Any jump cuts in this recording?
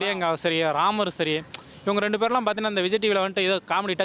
no; 0 cuts

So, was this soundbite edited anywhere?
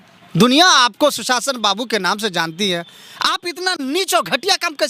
no; 0 cuts

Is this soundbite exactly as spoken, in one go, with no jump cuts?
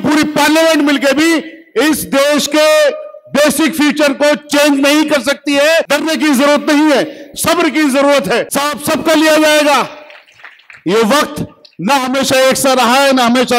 no; 2 cuts; at 5.9 s, 8.5 s

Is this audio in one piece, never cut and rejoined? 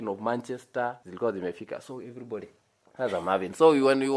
no; 1 cut; at 1.0 s

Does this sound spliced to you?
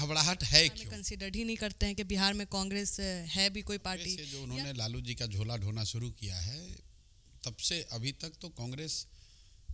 yes; 2 cuts; at 1.1 s, 4.3 s

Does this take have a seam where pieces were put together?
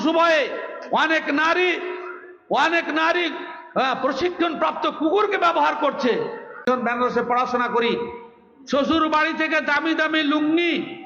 yes; 1 cut; at 6.6 s

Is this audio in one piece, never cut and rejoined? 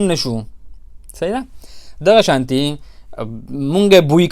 yes; 0 cuts

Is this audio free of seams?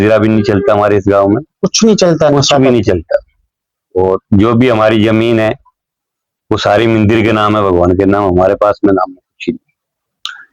yes; 0 cuts

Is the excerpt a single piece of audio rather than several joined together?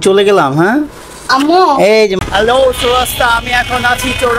no; 1 cut; at 2.2 s

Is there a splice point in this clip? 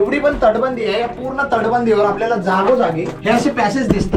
yes; 1 cut; at 3.1 s

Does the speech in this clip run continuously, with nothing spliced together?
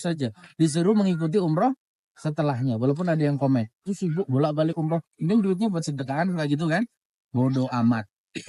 yes; 0 cuts

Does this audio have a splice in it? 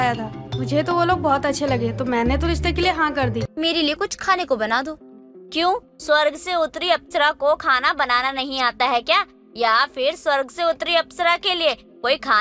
yes; 1 cut; at 3.5 s

